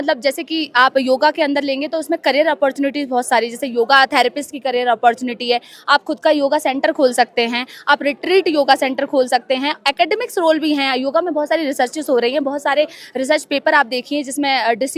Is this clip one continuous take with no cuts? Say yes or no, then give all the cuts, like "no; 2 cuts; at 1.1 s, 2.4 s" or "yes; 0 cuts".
yes; 0 cuts